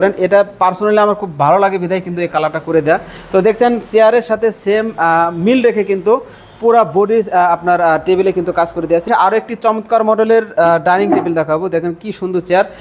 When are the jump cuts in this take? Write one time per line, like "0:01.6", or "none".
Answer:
0:09.1